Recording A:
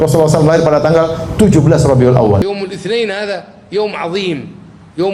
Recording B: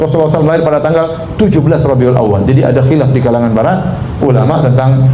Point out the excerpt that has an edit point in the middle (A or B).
A